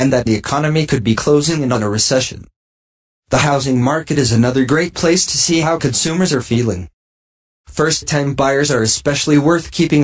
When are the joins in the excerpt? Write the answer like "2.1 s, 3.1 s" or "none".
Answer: 6.4 s